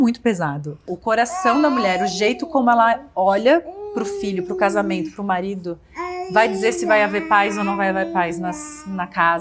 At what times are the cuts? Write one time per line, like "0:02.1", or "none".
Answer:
0:00.9